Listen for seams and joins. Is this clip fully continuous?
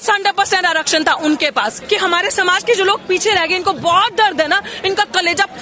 no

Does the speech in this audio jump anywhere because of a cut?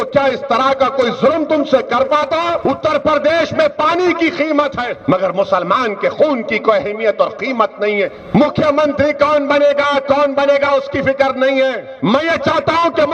yes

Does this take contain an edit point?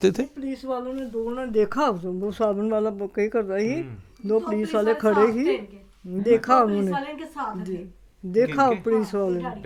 no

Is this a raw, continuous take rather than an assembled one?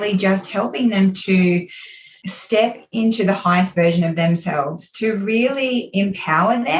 yes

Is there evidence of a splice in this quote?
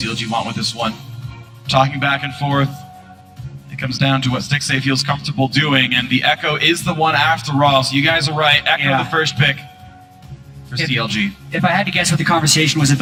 no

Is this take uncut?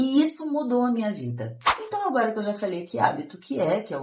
no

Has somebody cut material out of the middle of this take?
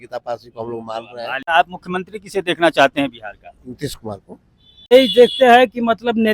yes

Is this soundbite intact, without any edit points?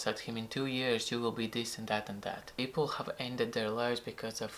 no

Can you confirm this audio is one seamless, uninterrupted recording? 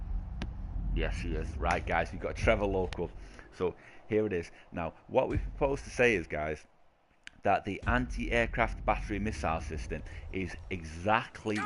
no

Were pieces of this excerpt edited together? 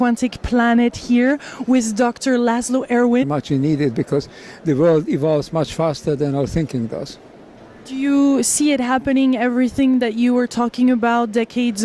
no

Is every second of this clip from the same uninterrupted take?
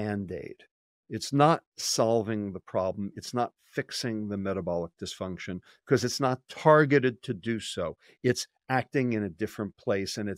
yes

